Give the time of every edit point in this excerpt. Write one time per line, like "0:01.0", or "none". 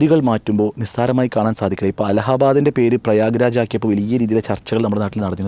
none